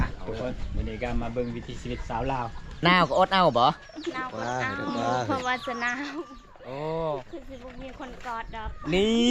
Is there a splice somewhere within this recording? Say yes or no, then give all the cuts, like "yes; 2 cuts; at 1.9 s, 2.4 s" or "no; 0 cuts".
yes; 1 cut; at 2.8 s